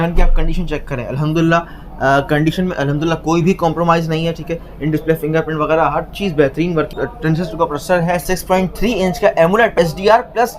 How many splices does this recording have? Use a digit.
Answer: 3